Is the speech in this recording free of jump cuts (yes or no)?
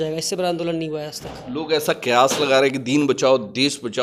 yes